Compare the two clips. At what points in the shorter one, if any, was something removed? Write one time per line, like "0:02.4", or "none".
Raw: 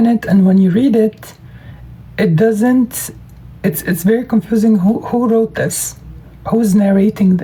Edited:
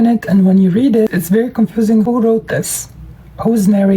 0:01.1
0:02.0